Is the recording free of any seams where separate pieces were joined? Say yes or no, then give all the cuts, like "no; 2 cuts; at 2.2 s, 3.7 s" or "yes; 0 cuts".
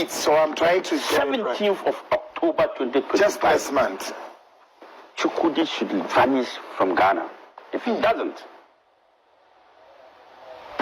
yes; 0 cuts